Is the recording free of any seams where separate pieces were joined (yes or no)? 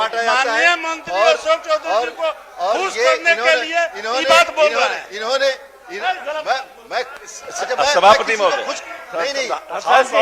yes